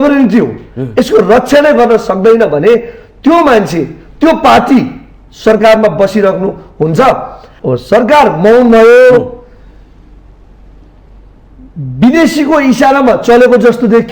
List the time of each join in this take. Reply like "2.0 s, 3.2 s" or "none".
7.5 s